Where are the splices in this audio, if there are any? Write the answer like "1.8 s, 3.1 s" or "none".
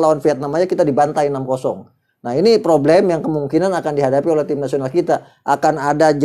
none